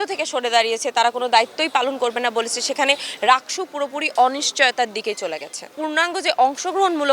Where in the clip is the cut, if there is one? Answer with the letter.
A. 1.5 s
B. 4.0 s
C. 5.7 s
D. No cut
C